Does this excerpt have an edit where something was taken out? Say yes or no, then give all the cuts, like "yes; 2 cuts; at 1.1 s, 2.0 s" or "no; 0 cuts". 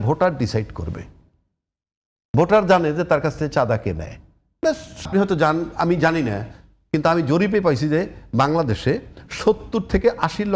yes; 1 cut; at 5.1 s